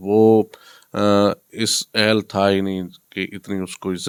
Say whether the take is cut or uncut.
uncut